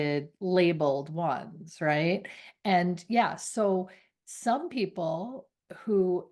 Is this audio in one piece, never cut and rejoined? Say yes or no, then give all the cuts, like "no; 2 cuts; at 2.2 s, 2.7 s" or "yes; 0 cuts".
yes; 0 cuts